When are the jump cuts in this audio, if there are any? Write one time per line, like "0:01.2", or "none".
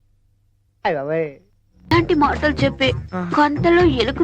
0:01.9